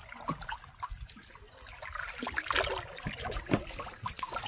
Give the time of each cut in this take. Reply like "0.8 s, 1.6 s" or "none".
none